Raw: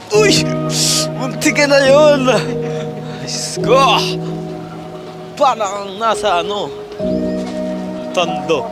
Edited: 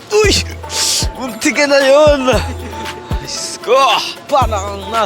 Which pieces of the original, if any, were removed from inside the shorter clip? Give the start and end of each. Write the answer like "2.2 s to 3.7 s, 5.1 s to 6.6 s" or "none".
4.1 s to 5.1 s

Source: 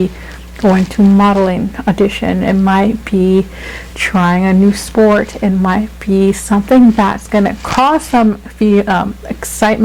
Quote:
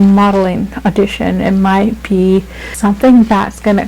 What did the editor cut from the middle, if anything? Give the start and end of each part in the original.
3.8 s to 6.4 s

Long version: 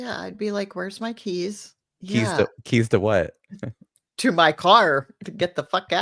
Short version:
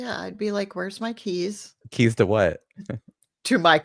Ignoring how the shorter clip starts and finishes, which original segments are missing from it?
1.8 s to 2.6 s

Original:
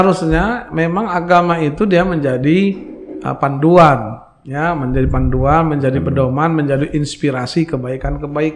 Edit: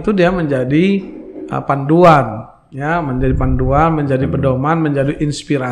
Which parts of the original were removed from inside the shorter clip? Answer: none

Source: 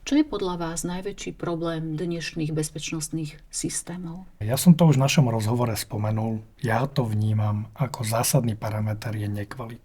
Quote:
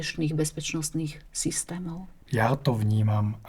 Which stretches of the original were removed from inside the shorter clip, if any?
4.4 s to 6.5 s

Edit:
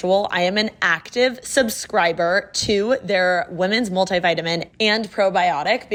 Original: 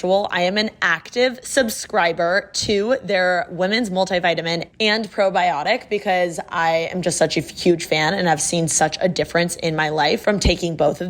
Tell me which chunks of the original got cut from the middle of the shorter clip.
none

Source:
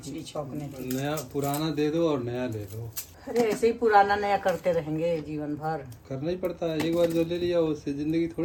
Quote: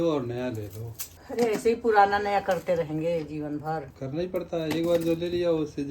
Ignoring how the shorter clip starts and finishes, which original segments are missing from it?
5.9 s to 6.0 s

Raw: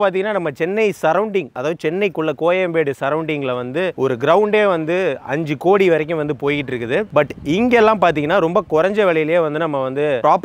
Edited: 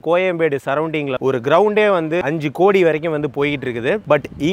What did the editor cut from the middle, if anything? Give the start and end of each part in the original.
3.5 s to 4.0 s, 5.0 s to 5.3 s

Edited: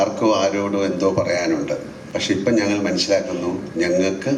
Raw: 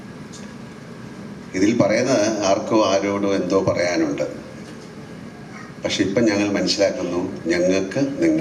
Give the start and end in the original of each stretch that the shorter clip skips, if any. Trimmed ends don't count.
4.5 s to 5.7 s

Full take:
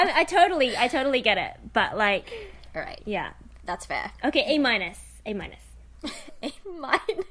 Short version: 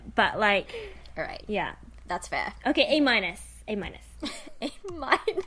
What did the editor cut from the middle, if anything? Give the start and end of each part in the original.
5.6 s to 5.8 s

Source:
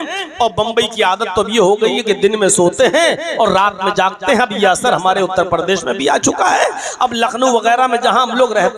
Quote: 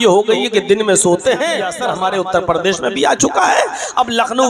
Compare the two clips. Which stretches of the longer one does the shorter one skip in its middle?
3.2 s to 4.7 s

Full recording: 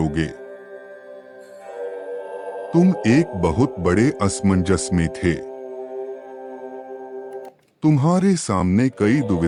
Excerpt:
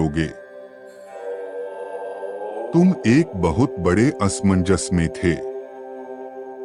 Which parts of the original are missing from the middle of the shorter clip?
5.4 s to 5.9 s

